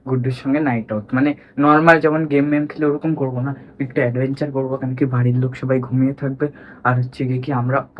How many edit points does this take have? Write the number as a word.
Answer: zero